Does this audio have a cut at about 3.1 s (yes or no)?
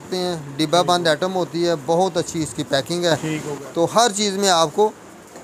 no